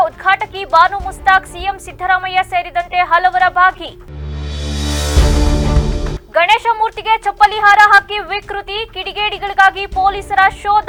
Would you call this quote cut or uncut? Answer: uncut